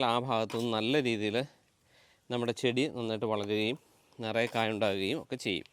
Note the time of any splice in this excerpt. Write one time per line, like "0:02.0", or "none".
none